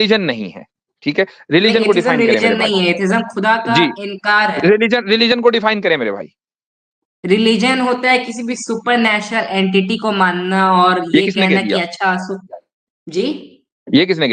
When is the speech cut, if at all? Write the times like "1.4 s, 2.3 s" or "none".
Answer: none

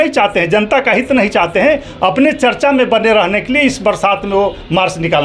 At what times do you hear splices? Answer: none

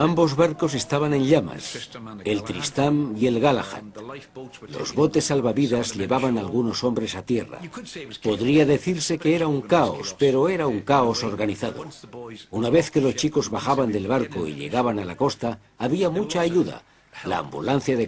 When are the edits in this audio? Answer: 3.7 s

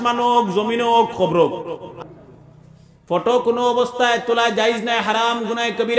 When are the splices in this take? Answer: 2.0 s

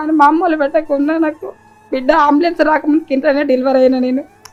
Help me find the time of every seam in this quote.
none

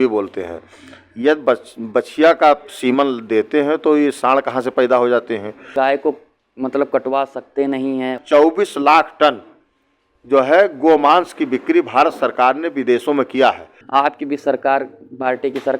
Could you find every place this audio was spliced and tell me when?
5.7 s, 8.1 s, 13.7 s

